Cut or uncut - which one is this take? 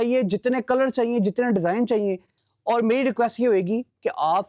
uncut